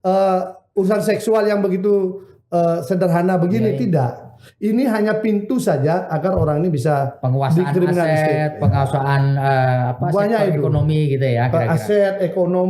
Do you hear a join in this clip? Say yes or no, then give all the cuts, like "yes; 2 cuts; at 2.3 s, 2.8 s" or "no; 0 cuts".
no; 0 cuts